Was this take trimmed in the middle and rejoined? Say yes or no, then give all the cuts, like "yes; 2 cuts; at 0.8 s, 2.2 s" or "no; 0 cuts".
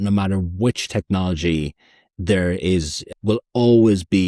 yes; 1 cut; at 3.0 s